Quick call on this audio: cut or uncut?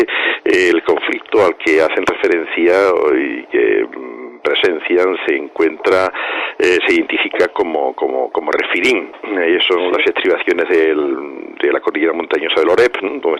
cut